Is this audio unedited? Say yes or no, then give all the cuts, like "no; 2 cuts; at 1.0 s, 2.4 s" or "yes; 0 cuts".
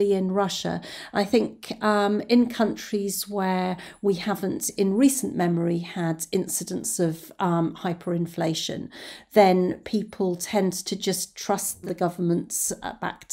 no; 1 cut; at 11.8 s